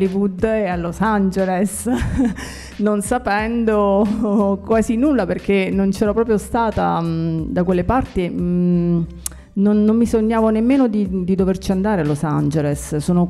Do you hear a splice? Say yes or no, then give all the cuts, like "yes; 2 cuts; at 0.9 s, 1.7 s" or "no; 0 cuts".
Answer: no; 0 cuts